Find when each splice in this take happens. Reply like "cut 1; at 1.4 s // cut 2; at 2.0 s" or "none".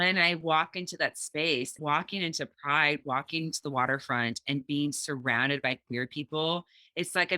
cut 1; at 1.8 s